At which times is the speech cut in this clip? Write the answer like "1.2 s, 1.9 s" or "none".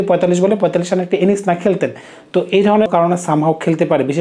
2.9 s